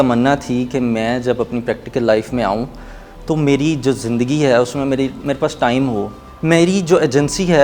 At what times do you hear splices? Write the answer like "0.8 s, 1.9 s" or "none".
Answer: 6.2 s